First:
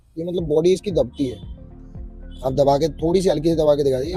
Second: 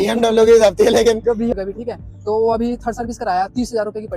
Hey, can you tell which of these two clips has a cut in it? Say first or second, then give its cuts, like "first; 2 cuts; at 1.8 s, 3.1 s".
second; 1 cut; at 1.5 s